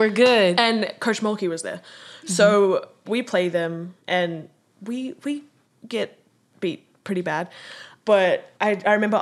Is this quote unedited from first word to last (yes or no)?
yes